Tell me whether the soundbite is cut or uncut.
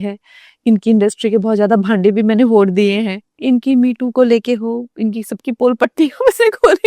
cut